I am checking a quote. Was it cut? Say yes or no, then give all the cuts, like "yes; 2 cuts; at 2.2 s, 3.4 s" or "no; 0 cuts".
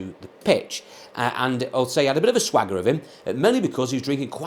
no; 0 cuts